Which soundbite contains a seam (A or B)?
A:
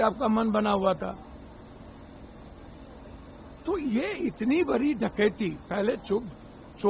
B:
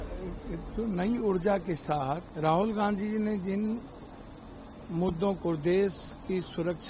B